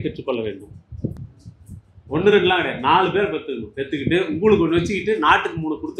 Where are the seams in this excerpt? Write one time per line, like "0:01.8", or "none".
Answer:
0:01.2